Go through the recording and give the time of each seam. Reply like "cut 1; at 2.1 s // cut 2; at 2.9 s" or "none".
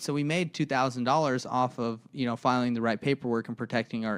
none